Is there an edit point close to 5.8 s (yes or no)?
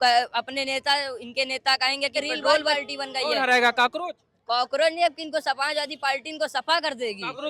no